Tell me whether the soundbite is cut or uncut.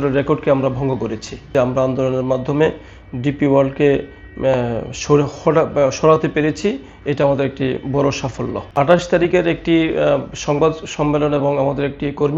cut